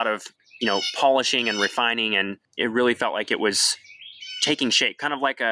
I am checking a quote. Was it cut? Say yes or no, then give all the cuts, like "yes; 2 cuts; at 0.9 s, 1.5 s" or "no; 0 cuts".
yes; 1 cut; at 2.4 s